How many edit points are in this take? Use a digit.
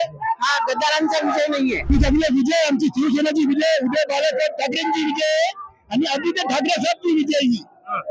1